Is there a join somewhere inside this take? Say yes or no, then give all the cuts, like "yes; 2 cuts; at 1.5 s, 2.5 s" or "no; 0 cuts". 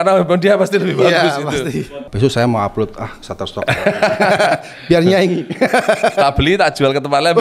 yes; 1 cut; at 2.1 s